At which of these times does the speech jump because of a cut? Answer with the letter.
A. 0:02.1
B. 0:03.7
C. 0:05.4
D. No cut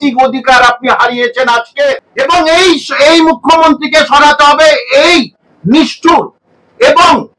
A